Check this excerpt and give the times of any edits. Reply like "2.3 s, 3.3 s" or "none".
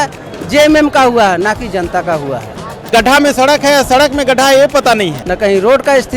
2.9 s, 5.2 s